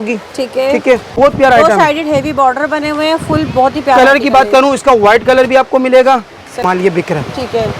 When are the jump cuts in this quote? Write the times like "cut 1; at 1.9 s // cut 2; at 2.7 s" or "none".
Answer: cut 1; at 1.1 s // cut 2; at 6.6 s